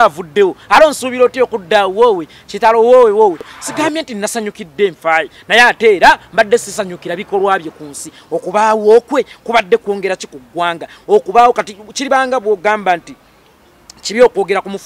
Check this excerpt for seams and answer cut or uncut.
cut